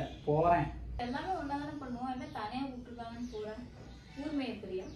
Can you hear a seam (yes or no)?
yes